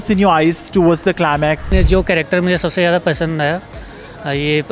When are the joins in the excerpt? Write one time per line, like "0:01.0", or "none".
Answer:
0:01.7